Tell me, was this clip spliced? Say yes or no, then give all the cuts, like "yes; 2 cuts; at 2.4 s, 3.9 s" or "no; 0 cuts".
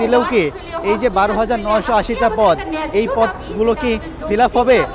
no; 0 cuts